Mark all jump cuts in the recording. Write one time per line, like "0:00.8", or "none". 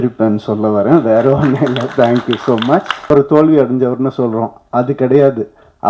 0:03.1